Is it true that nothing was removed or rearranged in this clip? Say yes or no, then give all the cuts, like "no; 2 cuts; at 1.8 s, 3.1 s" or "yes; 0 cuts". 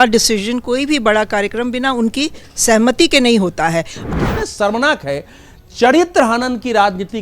no; 1 cut; at 4.0 s